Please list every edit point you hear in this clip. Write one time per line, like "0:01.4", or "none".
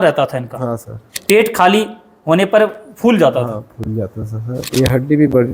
0:01.1
0:04.6